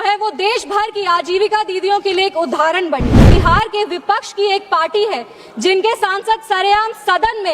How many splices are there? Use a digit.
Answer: 1